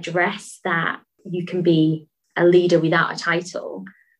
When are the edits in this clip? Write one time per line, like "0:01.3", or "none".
0:01.2